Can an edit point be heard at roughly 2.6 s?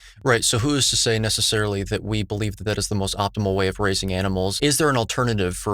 no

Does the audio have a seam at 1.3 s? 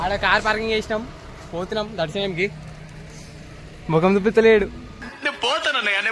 no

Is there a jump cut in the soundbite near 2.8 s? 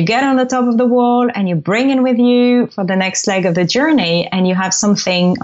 no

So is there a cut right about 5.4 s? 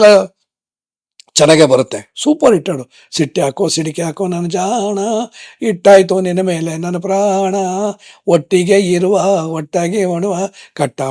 no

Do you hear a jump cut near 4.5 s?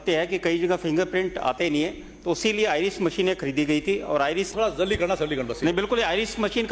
yes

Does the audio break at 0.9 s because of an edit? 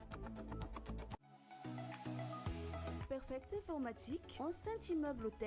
yes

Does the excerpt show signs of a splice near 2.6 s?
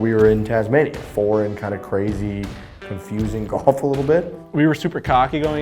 no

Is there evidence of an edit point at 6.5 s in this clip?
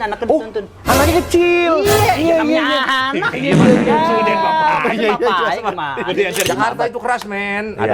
yes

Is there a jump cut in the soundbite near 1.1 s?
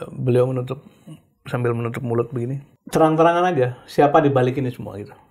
no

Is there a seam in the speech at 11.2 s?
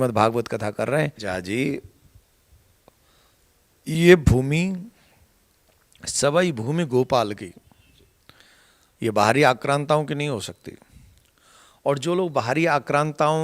no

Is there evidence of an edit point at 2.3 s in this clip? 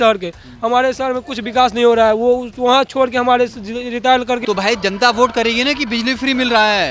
no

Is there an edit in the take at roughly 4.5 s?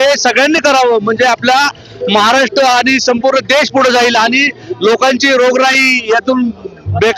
no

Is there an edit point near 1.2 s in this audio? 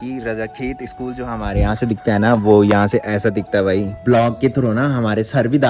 no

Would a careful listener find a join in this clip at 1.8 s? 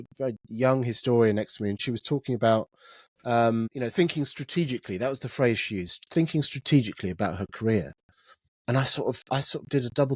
yes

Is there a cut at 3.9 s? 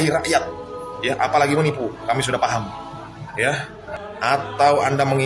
yes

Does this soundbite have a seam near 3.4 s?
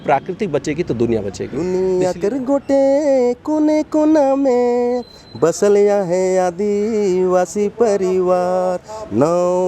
no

